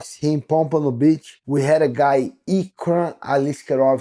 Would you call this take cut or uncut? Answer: uncut